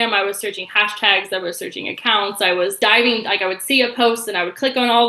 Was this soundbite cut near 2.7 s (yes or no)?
yes